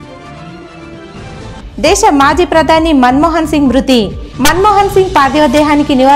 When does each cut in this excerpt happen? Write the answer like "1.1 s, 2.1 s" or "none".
1.5 s